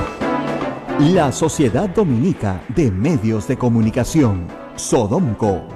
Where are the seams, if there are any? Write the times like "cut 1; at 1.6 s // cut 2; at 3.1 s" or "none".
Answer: none